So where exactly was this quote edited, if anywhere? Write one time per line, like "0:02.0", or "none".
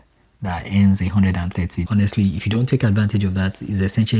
0:01.9